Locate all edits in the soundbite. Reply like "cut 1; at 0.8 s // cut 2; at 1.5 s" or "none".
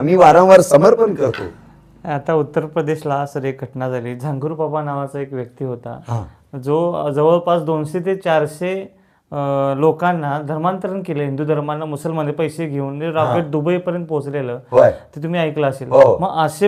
none